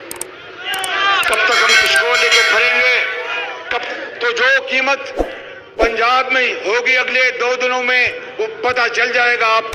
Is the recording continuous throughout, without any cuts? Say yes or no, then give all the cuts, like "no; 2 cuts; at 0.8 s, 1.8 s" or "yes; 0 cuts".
no; 1 cut; at 3.8 s